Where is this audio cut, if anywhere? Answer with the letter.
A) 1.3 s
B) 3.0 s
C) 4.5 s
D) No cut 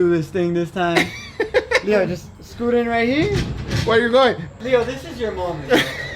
C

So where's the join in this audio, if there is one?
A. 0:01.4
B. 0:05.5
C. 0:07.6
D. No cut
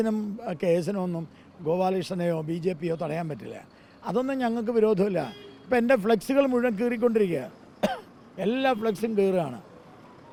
D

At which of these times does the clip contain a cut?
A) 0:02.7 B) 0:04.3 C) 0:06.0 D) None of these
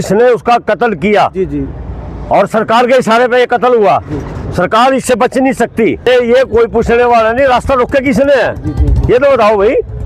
C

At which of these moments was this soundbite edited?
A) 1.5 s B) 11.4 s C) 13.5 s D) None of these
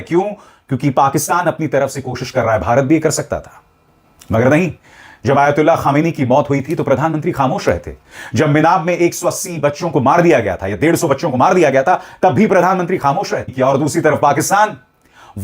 C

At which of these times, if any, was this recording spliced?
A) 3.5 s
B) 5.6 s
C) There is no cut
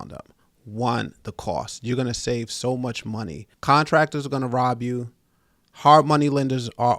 A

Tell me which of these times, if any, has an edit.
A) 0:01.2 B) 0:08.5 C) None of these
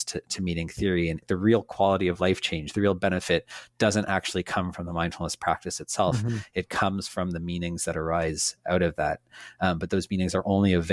A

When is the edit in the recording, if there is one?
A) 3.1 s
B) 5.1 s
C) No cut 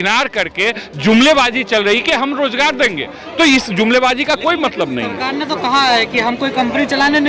C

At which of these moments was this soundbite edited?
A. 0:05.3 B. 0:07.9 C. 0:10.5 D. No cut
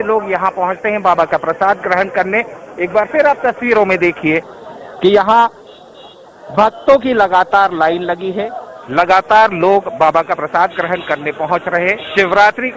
D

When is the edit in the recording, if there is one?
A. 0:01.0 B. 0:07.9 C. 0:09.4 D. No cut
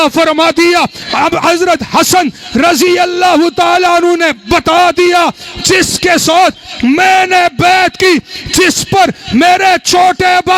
A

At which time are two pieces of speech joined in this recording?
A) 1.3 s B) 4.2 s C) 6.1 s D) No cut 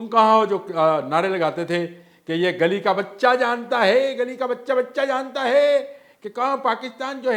D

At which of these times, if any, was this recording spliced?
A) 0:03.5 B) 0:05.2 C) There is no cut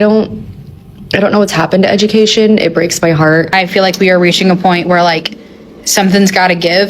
A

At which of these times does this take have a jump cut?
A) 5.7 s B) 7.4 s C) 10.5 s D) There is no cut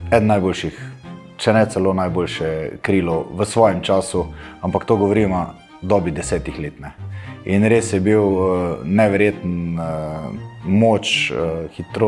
D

